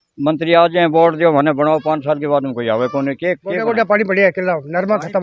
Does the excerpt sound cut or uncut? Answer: cut